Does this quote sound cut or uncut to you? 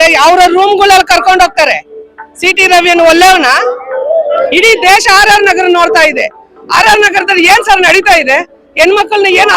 cut